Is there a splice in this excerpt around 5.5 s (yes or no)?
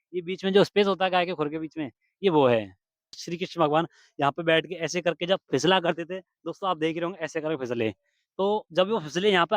no